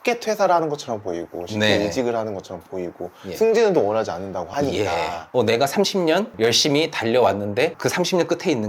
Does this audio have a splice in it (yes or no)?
yes